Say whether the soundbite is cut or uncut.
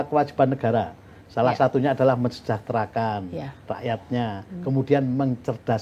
uncut